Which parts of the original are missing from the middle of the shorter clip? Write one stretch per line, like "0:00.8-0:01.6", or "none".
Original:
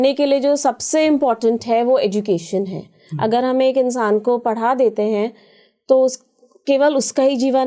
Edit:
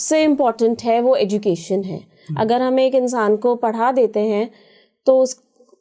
none